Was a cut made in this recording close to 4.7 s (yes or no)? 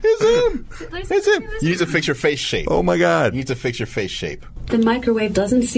yes